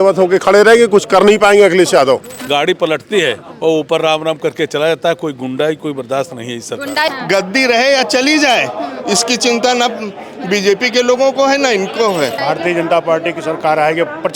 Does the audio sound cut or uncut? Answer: cut